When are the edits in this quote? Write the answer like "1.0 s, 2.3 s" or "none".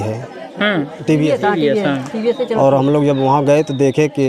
1.3 s

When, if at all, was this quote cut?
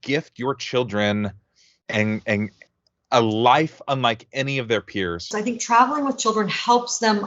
5.3 s

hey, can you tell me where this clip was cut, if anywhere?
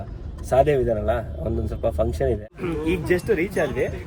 2.5 s

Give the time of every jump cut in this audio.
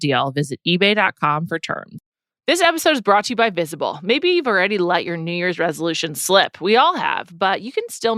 2.0 s

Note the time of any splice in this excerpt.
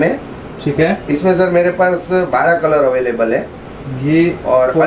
none

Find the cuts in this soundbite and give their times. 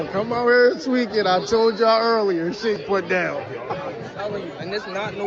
2.8 s

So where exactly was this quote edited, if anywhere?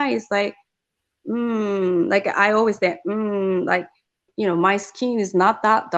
4.3 s

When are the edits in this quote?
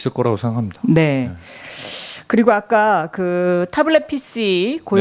none

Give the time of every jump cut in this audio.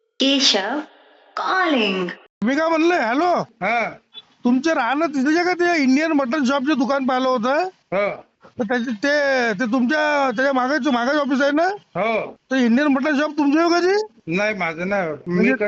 2.4 s

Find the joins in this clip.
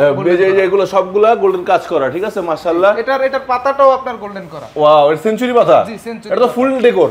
none

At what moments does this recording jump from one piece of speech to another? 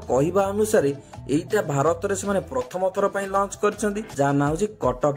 4.0 s

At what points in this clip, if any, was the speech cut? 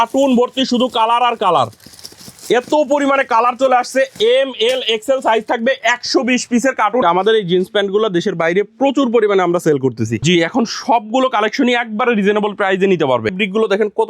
7.0 s, 10.2 s, 13.3 s

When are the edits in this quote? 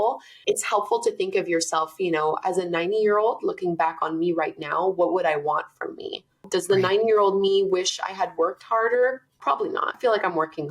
9.7 s

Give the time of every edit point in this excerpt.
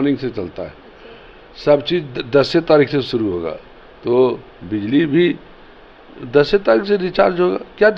none

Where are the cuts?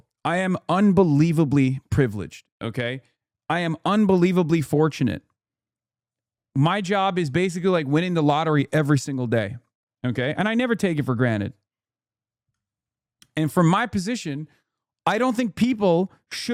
none

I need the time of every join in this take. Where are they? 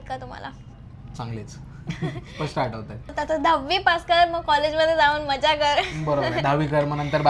3.1 s

